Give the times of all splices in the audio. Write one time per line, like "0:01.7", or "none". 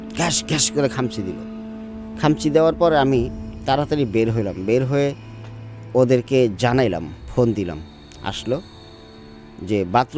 none